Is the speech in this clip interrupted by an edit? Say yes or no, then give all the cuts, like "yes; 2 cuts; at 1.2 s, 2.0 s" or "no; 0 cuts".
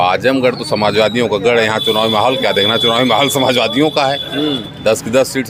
no; 0 cuts